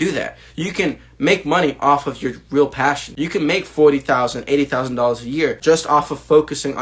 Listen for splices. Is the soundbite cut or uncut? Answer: cut